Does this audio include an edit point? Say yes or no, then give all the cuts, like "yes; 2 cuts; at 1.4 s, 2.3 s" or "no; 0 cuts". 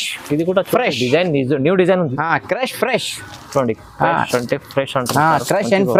no; 0 cuts